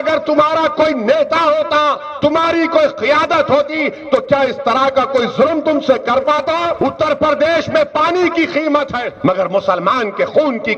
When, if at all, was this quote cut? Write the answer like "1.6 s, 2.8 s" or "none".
6.7 s, 9.0 s

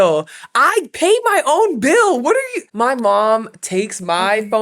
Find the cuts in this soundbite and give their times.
2.6 s

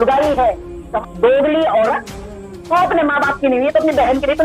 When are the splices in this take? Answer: 0.9 s

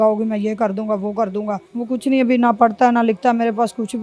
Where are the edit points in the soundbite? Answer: 1.7 s

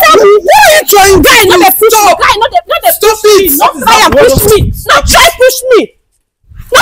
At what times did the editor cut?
none

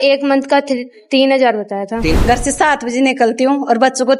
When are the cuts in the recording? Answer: 2.1 s

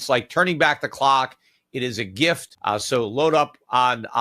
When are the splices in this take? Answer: 2.5 s

